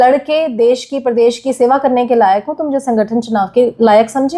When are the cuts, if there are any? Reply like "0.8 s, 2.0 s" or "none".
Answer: none